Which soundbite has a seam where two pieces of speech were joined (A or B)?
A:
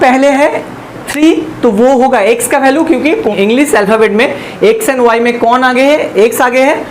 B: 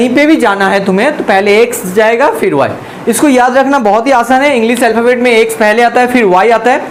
A